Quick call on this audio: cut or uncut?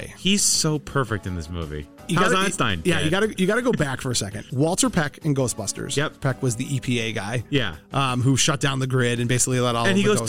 cut